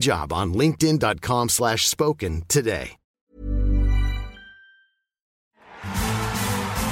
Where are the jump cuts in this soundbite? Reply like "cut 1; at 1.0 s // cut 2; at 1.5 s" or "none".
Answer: cut 1; at 5.3 s